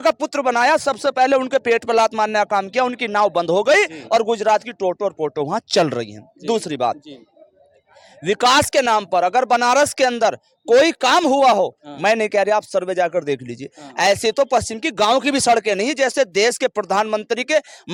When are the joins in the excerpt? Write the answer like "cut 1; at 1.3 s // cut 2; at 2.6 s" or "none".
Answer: none